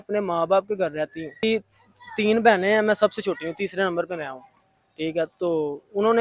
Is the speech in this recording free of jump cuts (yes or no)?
no